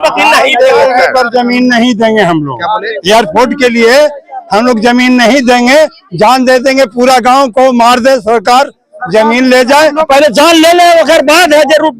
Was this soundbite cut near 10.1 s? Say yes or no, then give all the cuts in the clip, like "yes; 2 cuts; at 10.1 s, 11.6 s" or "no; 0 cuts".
yes; 1 cut; at 10.1 s